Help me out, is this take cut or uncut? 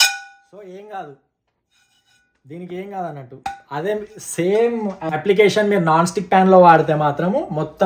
cut